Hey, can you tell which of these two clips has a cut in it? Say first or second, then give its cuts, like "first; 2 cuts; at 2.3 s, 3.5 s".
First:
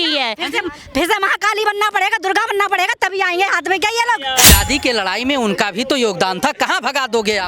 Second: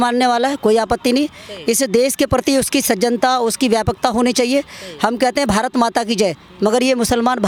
first; 1 cut; at 4.5 s